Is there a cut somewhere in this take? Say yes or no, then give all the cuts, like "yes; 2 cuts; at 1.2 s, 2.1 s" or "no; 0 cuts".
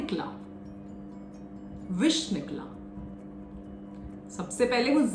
no; 0 cuts